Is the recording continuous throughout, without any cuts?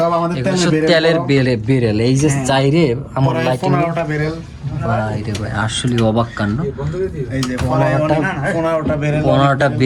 yes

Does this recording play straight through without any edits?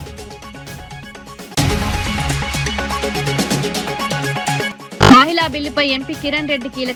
yes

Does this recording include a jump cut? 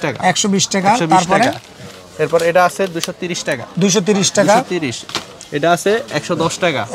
no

